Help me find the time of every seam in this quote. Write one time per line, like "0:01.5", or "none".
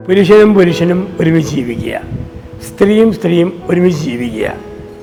none

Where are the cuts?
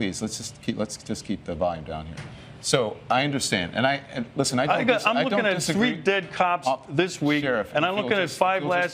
0:04.8

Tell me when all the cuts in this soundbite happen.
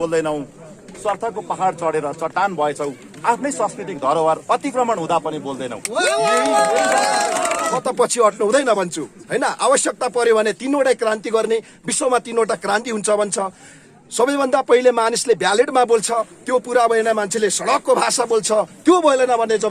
0:07.7

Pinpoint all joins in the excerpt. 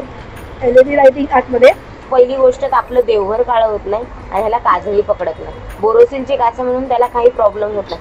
0:01.9

